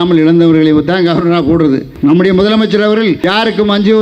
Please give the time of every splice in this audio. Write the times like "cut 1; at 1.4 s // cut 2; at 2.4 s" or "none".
cut 1; at 1.9 s // cut 2; at 3.2 s